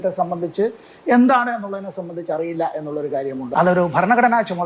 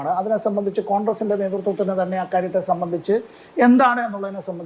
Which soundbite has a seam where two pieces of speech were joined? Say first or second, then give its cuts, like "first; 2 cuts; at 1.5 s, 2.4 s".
first; 1 cut; at 3.5 s